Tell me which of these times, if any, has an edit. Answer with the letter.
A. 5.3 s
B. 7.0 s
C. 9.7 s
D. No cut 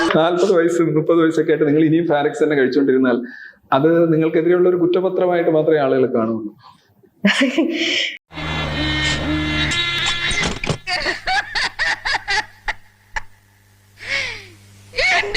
C